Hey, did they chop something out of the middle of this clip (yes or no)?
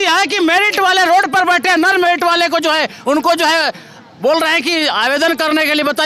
no